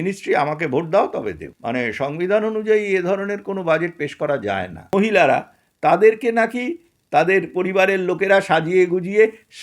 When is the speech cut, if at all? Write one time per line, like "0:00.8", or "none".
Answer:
0:01.5
0:04.9

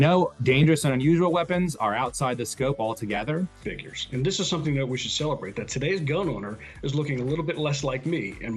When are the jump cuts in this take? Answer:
none

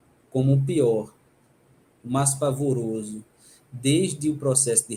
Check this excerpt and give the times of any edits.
none

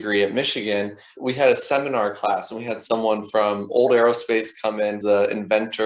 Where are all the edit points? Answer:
0:01.1
0:05.0

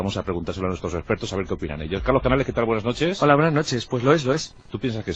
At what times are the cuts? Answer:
none

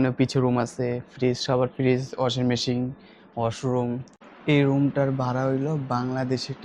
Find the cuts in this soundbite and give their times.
0:04.3

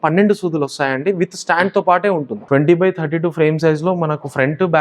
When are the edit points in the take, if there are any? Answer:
0:02.3

